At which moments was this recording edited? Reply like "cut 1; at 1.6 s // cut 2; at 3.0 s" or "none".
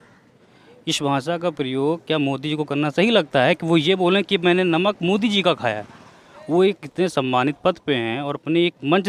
none